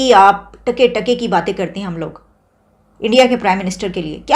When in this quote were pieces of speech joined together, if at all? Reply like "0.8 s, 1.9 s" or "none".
none